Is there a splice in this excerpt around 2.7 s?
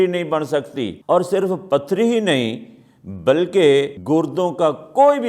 no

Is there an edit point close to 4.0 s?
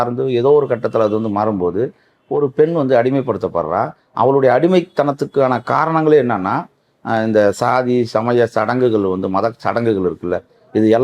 no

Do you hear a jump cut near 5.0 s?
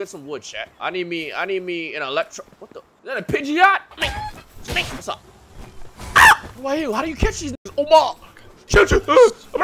yes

